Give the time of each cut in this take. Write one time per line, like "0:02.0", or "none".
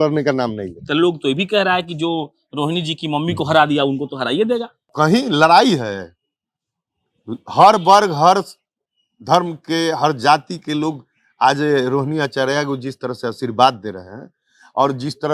0:04.8

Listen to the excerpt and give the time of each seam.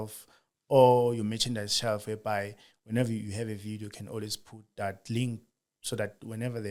none

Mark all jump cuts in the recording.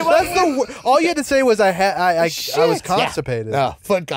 none

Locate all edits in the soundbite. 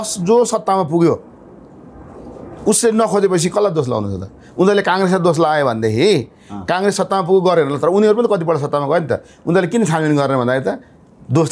none

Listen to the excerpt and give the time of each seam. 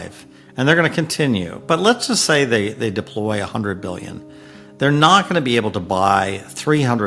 none

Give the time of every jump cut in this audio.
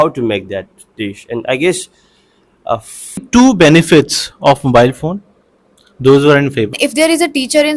0:03.2
0:06.8

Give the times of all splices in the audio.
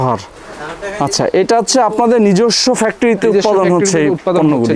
none

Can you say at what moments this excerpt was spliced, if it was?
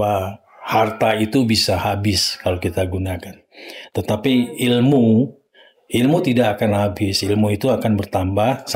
none

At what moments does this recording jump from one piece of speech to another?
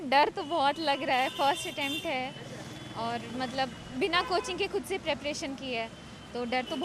none

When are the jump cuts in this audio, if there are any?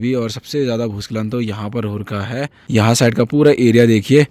none

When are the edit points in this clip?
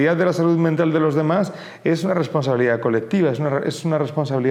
none

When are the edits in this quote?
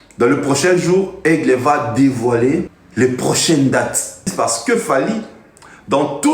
0:02.8
0:04.3

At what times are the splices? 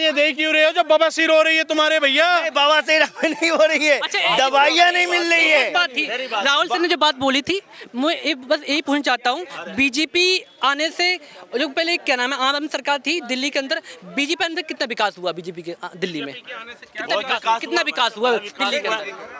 none

